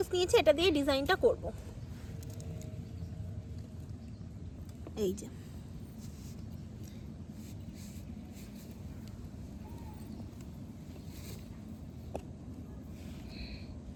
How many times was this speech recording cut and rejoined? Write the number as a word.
zero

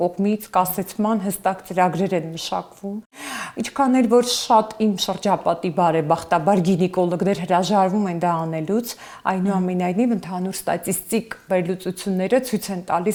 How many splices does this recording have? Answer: zero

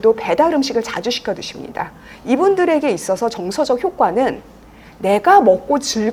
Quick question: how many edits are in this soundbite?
zero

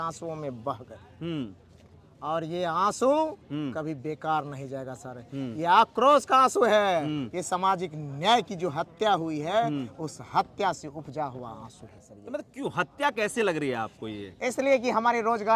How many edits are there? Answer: zero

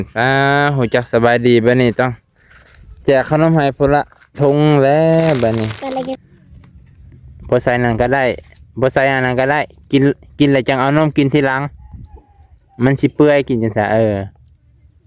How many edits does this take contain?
one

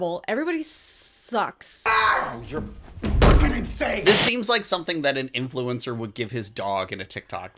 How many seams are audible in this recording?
two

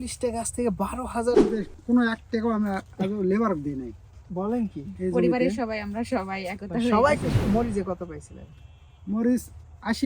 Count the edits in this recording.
two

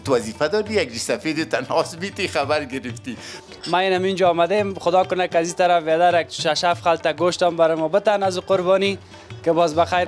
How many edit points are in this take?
one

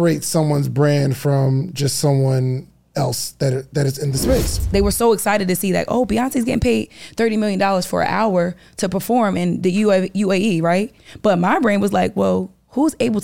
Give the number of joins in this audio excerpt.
two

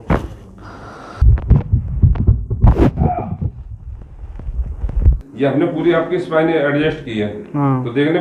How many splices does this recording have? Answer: one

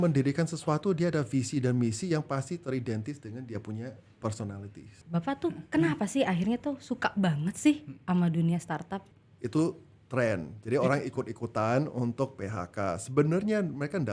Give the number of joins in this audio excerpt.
two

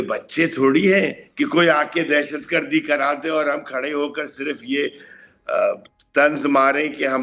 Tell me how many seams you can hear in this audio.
zero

